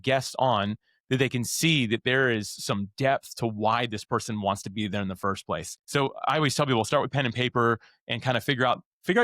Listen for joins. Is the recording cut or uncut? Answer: cut